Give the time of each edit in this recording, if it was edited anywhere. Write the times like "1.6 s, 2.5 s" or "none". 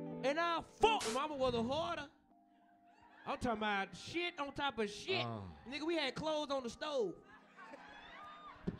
1.1 s

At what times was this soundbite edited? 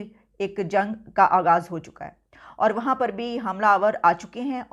none

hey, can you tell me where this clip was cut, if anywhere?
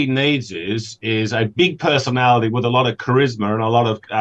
none

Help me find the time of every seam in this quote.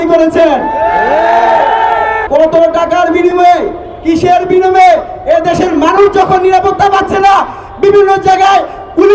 2.2 s

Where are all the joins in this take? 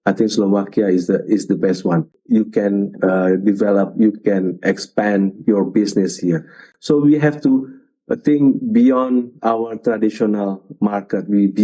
2.1 s, 6.7 s

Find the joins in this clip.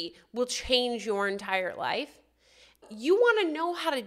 2.7 s

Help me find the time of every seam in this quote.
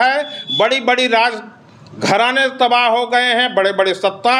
none

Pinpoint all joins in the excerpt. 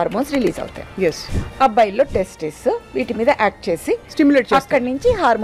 1.3 s

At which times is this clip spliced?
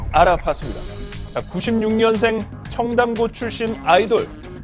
none

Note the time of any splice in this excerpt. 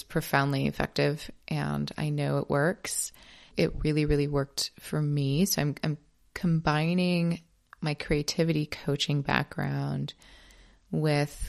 none

